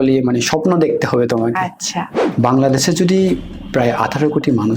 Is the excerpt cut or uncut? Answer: cut